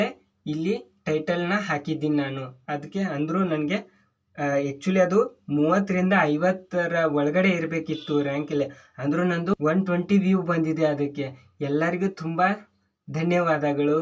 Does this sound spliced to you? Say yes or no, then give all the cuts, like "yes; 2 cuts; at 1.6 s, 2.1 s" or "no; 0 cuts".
no; 0 cuts